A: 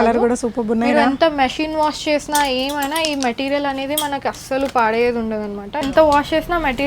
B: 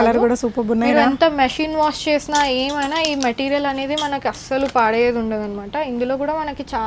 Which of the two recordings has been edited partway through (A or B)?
A